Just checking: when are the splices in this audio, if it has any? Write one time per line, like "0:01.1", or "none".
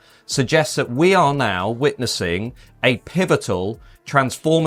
none